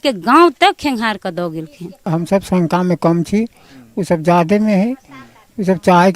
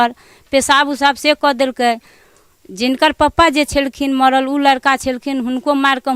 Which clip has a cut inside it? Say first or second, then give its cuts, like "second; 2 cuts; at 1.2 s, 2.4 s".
first; 1 cut; at 2.0 s